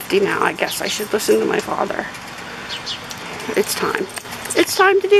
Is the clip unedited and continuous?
yes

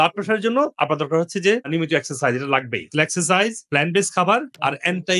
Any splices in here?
no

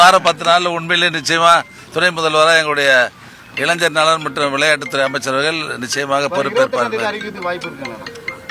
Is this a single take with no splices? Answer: yes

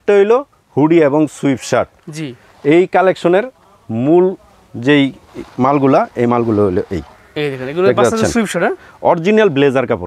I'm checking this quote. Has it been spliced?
no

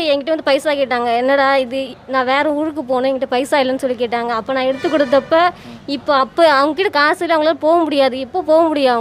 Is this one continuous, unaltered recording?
yes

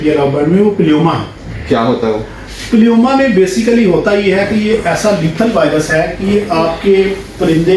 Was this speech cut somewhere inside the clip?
no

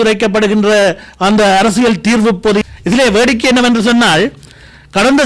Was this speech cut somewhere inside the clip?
yes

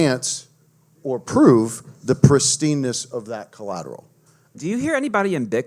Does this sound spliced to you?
yes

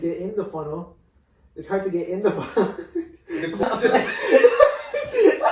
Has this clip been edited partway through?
yes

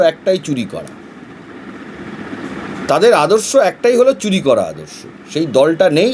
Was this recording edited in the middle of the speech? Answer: no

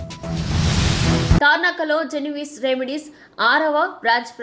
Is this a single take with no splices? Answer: yes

